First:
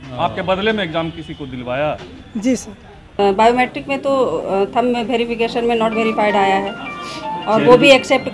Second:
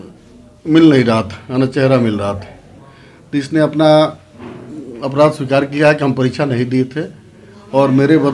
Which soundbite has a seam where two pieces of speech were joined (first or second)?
first